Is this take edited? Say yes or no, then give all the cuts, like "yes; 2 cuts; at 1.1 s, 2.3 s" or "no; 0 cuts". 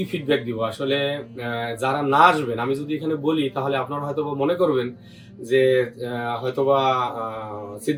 no; 0 cuts